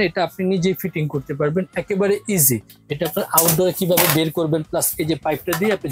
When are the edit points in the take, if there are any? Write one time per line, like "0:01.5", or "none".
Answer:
0:02.7